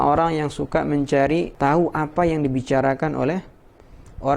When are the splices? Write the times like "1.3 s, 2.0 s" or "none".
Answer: 1.5 s